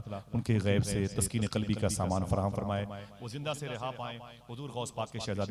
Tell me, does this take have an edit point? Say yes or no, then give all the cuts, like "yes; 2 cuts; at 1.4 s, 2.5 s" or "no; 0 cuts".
no; 0 cuts